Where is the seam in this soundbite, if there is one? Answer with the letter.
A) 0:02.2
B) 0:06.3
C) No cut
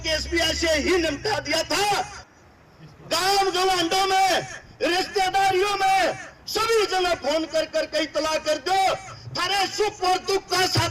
A